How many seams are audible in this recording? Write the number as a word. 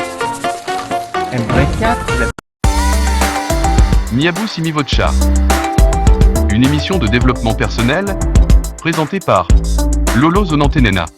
one